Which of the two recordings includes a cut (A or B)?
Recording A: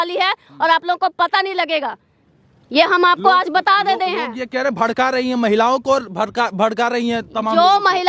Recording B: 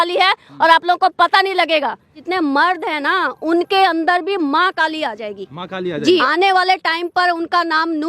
B